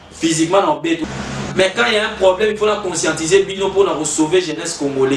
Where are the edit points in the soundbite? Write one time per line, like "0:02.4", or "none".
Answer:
0:01.0